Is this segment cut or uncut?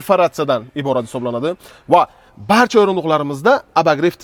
uncut